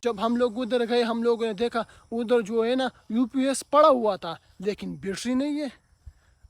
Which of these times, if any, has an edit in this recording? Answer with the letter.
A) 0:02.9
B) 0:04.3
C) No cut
C